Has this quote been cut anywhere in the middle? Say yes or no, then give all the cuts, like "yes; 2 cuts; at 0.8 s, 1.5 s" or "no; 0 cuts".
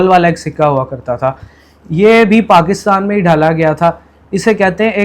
no; 0 cuts